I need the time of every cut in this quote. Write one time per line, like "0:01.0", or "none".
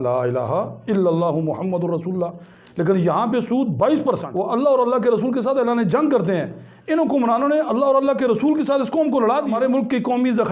0:04.2
0:09.5